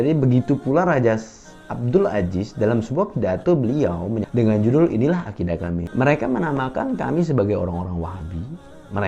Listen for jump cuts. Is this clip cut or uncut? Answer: cut